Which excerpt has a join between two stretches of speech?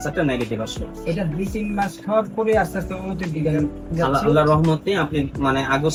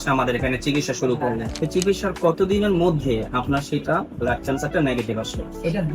second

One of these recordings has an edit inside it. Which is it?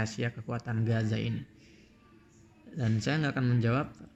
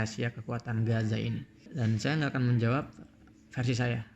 second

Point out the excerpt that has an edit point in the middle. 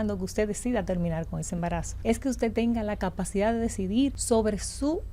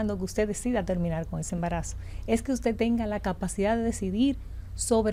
first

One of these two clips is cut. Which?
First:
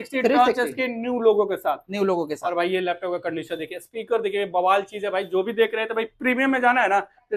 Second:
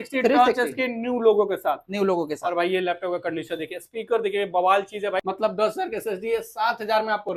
second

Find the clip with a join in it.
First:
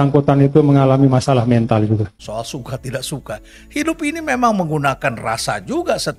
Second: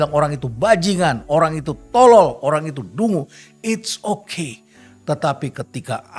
first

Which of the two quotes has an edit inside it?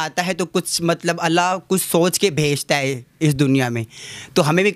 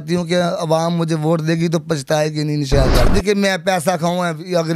second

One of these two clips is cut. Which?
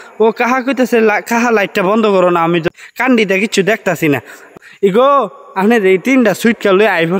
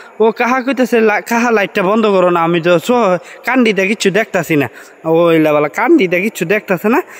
first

